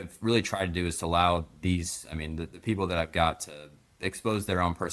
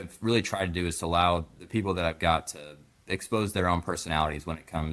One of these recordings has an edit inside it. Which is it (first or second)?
second